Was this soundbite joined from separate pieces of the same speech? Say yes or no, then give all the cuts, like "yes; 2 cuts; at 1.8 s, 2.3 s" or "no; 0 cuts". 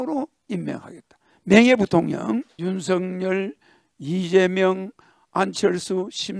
yes; 1 cut; at 2.5 s